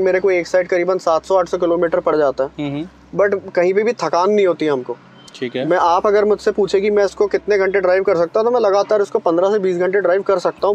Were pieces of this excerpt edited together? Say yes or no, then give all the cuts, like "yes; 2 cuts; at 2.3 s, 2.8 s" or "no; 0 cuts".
no; 0 cuts